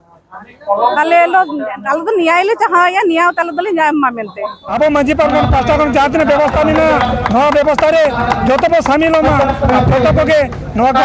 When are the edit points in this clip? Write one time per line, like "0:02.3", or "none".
0:04.7